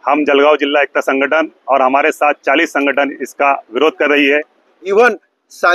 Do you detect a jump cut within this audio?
yes; 1 cut; at 4.8 s

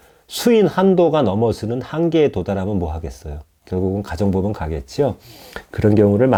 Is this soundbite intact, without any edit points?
yes; 0 cuts

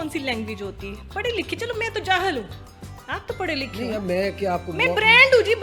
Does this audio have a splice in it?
no; 0 cuts

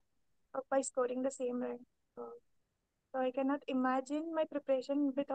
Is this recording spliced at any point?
no; 0 cuts

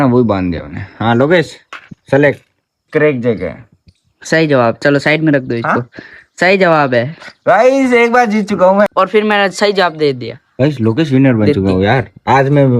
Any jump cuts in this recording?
yes; 2 cuts; at 2.8 s, 8.9 s

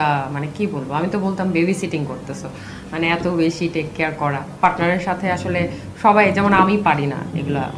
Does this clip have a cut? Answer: no; 0 cuts

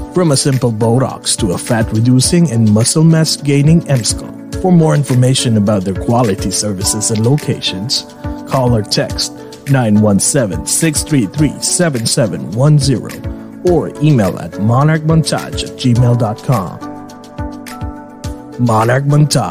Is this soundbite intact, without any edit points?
yes; 0 cuts

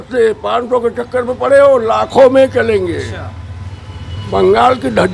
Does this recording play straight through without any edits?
no; 1 cut; at 4.2 s

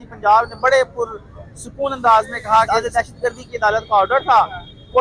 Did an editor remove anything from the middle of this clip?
yes; 1 cut; at 2.7 s

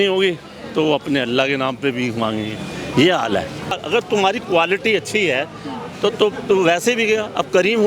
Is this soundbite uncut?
no; 1 cut; at 3.8 s

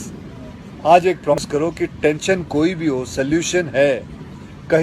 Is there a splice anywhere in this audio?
yes; 1 cut; at 1.4 s

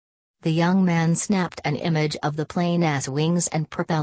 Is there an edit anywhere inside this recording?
yes; 1 cut; at 2.4 s

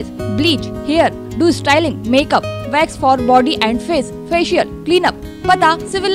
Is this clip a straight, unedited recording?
yes; 0 cuts

